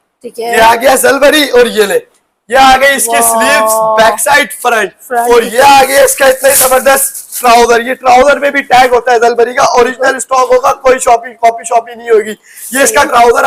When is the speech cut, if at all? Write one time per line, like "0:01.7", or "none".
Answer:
none